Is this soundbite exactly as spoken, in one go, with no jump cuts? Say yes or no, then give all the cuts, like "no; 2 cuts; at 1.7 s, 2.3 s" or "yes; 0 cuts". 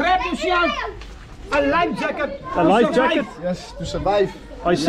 yes; 0 cuts